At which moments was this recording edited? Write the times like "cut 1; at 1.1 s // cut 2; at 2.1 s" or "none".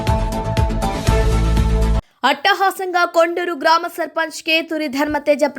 cut 1; at 2.1 s